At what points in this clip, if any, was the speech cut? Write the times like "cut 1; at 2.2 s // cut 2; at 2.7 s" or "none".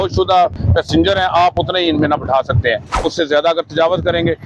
cut 1; at 3.0 s